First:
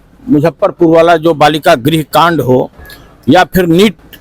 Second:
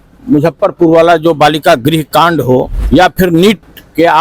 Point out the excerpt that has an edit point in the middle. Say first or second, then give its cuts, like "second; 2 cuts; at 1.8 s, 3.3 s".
second; 1 cut; at 2.8 s